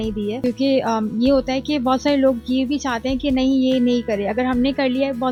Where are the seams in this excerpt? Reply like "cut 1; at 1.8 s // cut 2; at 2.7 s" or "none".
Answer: none